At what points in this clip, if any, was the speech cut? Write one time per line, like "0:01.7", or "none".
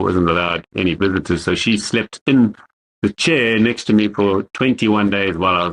none